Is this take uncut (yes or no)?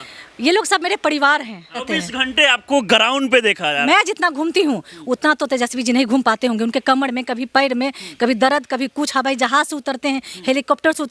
no